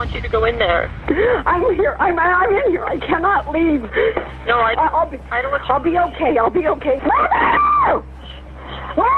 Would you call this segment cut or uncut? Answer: cut